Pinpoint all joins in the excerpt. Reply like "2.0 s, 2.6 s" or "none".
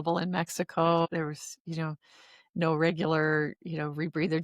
1.1 s